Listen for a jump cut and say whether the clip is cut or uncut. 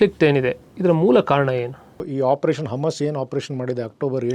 cut